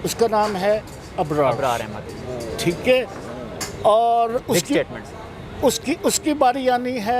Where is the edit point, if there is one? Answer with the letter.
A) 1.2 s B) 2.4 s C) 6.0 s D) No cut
D